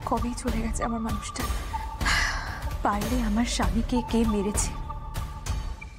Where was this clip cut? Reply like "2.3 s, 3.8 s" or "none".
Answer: 2.7 s

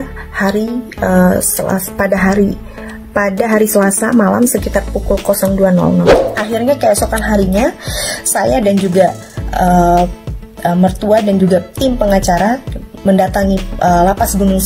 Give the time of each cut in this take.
6.2 s

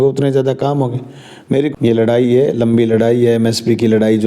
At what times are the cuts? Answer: 1.7 s

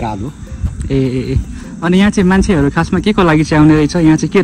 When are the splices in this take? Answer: none

